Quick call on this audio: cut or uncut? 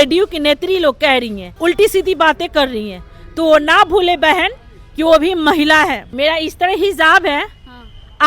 cut